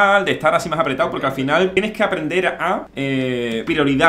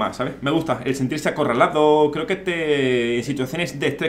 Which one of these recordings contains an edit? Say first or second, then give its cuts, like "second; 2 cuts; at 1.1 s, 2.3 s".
first; 2 cuts; at 1.8 s, 3.3 s